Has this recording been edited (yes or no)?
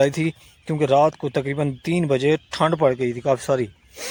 no